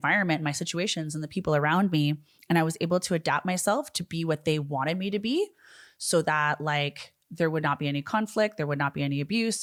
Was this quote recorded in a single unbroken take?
yes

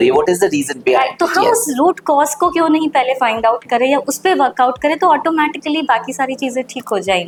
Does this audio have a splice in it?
no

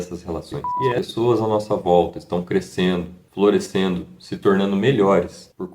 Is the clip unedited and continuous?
no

